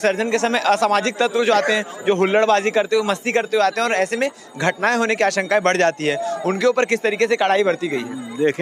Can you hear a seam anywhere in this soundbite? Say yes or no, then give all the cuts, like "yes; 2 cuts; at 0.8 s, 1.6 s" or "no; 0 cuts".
no; 0 cuts